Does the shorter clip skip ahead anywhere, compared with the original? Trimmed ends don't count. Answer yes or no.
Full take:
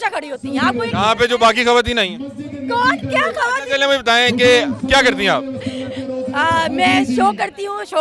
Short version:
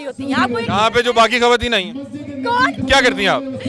yes